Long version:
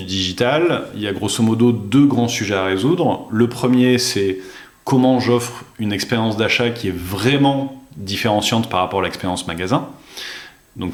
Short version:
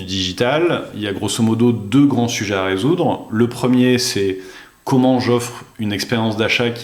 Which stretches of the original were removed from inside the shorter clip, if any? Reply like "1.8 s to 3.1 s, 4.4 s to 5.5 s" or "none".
none